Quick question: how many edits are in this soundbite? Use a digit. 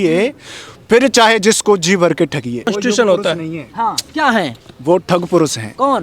1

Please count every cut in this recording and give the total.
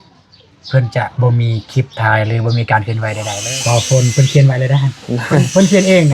1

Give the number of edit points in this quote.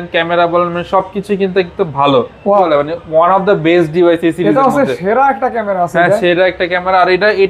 1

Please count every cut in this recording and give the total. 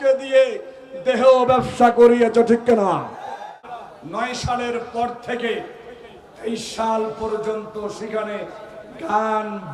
1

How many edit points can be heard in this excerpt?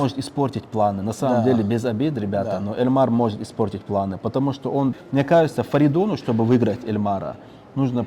1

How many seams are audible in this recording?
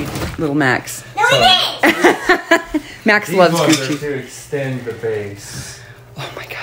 0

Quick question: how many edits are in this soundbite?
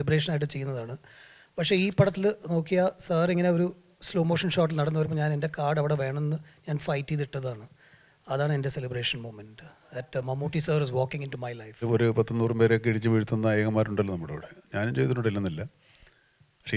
1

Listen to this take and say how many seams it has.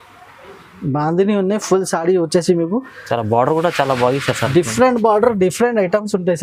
0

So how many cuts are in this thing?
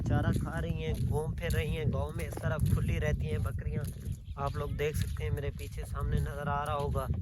0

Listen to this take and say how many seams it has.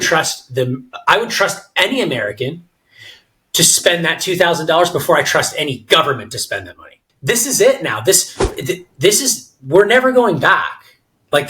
1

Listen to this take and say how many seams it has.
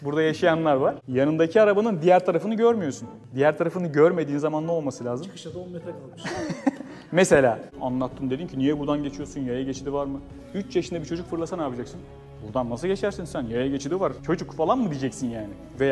2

